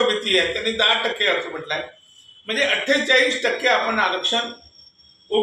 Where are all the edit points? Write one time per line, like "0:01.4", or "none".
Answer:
none

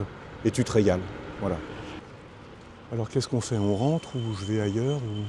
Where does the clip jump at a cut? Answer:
0:02.0

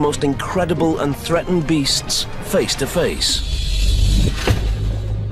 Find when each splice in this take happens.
0:01.2

